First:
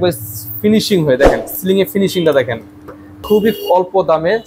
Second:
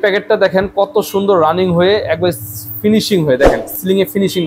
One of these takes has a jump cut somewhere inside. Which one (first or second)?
first